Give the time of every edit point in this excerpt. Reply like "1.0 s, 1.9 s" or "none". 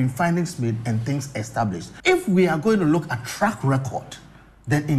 1.9 s